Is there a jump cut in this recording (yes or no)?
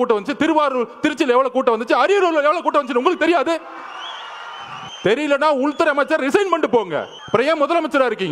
yes